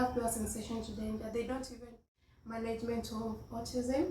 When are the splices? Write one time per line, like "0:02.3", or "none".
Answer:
0:01.9